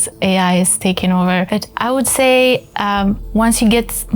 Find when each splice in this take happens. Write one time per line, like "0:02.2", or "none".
0:01.5